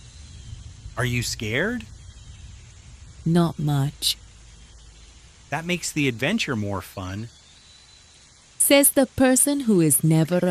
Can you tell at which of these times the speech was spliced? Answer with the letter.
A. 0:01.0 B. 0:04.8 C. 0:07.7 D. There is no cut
A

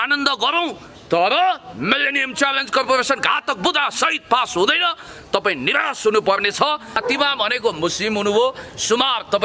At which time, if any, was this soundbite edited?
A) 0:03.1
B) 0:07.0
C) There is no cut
B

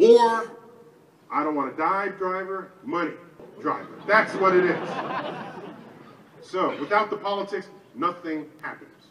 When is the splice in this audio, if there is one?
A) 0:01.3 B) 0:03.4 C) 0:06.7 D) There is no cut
B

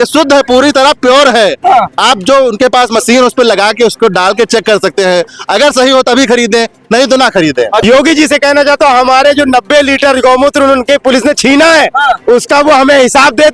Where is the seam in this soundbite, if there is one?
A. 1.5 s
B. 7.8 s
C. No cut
B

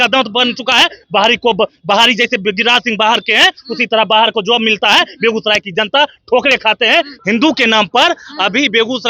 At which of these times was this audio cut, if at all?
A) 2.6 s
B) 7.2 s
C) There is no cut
B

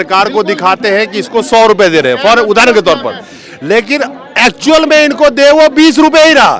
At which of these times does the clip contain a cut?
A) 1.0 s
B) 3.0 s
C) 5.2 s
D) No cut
D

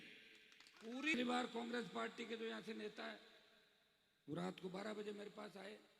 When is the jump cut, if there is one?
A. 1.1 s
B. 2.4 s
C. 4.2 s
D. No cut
A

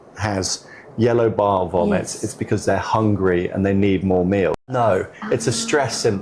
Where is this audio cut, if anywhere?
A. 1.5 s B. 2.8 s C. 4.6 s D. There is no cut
C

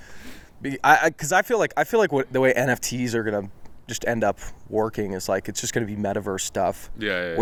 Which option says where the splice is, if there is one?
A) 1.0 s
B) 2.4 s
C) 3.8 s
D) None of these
D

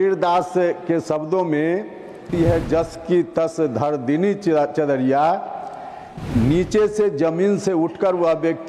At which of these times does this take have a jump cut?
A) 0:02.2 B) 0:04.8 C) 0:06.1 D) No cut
A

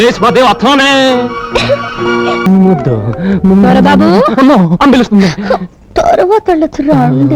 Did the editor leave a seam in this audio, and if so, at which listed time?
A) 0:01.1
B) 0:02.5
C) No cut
B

